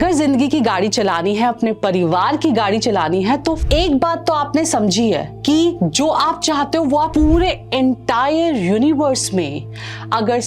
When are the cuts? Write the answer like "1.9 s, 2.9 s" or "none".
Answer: 3.6 s, 7.1 s